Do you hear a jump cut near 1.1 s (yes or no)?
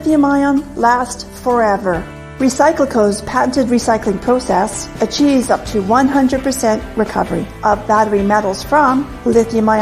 yes